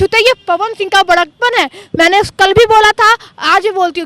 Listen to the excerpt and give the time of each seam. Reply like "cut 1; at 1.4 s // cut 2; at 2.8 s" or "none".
none